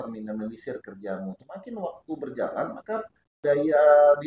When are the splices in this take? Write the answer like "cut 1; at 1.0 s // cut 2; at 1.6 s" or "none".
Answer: cut 1; at 1.4 s // cut 2; at 3.2 s